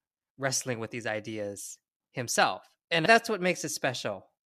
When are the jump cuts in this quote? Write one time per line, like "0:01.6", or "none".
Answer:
0:03.0

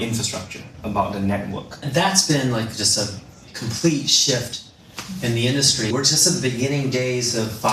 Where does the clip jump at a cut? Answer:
0:01.9
0:05.9

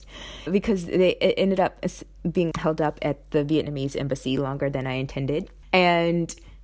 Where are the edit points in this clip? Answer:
0:05.5

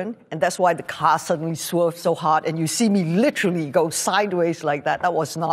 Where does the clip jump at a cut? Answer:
0:02.0

